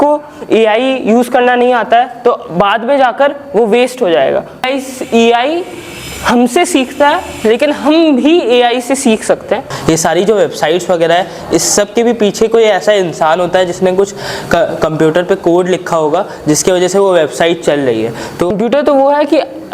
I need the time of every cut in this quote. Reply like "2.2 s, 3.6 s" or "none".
4.7 s, 9.7 s, 18.5 s